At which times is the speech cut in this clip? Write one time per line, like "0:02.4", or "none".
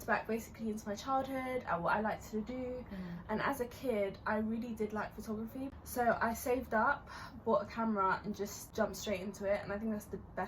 0:05.7
0:08.6